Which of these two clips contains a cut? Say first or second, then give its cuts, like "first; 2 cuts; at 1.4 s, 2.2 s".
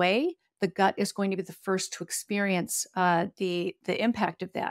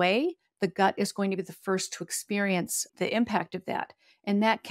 second; 1 cut; at 2.9 s